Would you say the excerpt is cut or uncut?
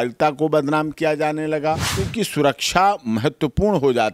cut